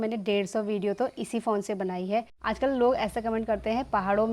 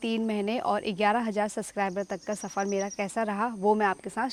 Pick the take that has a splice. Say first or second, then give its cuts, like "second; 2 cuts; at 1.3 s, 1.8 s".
first; 1 cut; at 2.3 s